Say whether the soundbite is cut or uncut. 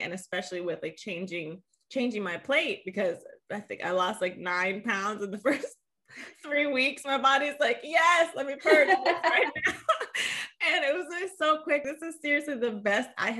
cut